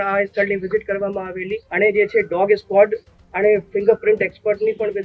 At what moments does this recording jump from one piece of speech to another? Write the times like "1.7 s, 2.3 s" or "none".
1.6 s